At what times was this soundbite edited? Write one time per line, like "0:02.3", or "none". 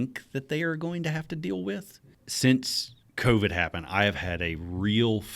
0:02.1